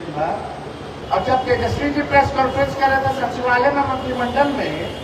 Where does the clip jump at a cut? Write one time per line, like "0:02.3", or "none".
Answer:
0:01.0